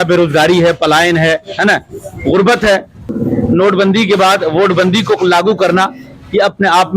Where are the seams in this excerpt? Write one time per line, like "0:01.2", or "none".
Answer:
0:03.1